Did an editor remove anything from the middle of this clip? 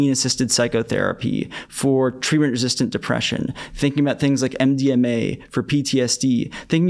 no; 0 cuts

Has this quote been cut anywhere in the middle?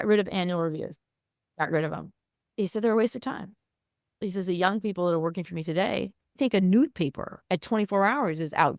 yes; 3 cuts; at 1.5 s, 4.2 s, 6.4 s

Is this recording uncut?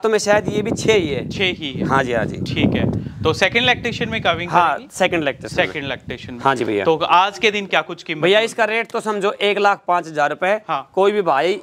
yes; 0 cuts

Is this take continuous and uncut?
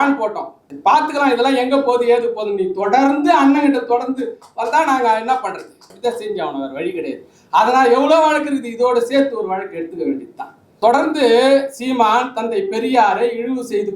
yes; 0 cuts

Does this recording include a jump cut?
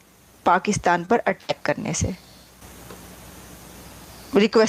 yes; 1 cut; at 2.4 s

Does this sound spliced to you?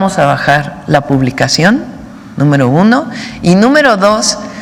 no; 0 cuts

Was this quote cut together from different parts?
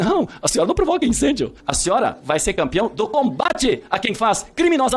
yes; 1 cut; at 1.6 s

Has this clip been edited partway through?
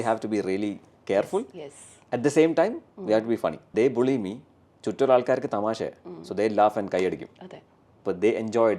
yes; 1 cut; at 3.7 s

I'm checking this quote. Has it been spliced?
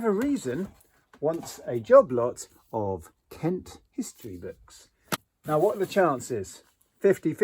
yes; 1 cut; at 5.2 s

